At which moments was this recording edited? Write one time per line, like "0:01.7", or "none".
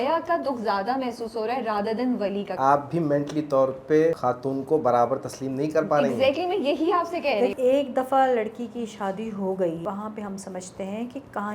0:02.6
0:04.2
0:07.5
0:09.8

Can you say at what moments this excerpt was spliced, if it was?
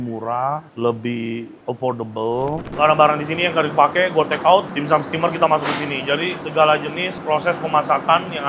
0:02.7

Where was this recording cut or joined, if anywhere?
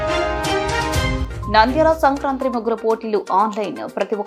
none

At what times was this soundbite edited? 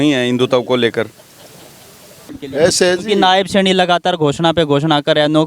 0:02.4

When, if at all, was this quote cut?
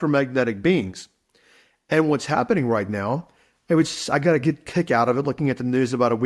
none

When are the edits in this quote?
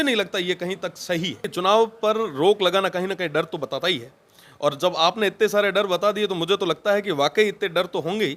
0:01.5

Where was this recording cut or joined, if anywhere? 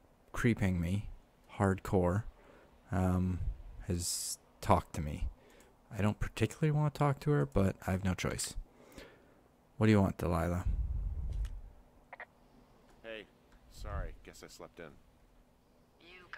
0:09.8

